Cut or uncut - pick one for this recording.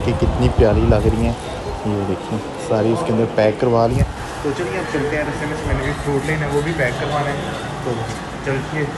uncut